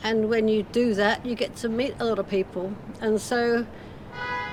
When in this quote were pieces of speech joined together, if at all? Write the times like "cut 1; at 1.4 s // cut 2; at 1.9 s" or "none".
none